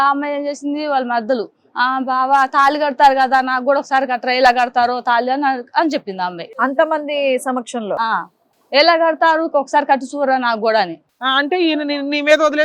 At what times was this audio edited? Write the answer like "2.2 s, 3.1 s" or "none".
6.4 s, 11.1 s